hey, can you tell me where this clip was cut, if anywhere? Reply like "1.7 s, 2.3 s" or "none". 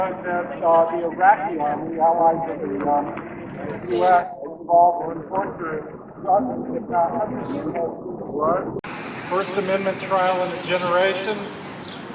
8.8 s